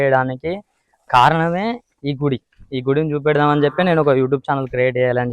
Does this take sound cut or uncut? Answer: uncut